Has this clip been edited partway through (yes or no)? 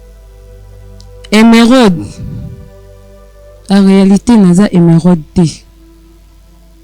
yes